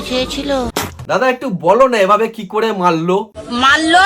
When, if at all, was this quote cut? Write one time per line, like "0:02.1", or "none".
none